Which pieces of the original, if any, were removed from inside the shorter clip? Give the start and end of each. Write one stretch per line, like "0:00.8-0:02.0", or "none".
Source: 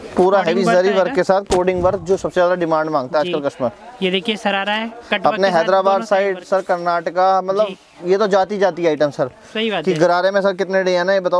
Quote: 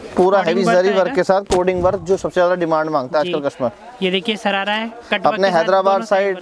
none